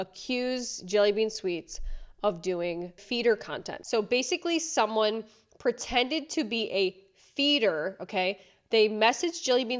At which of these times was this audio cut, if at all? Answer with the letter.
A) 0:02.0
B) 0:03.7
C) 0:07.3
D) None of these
B